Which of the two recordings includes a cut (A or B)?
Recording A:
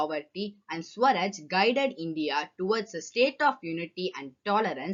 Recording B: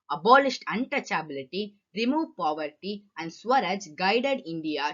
B